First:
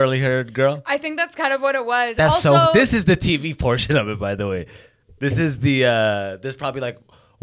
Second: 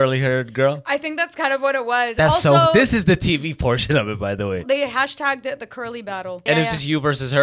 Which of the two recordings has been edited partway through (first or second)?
second